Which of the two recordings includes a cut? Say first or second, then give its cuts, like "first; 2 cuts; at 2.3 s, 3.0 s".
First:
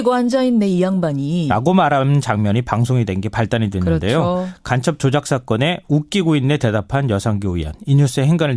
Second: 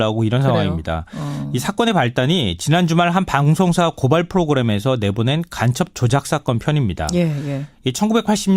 second; 1 cut; at 6.9 s